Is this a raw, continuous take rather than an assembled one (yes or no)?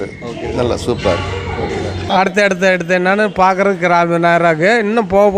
no